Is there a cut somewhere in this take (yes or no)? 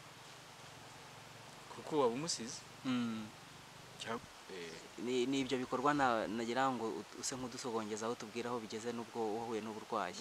yes